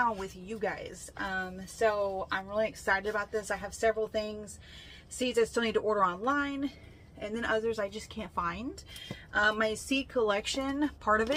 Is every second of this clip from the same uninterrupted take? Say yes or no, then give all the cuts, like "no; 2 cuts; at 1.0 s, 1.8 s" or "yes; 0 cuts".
yes; 0 cuts